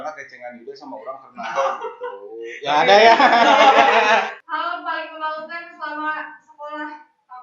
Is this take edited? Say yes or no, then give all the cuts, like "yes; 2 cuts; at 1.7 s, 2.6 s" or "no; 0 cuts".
no; 0 cuts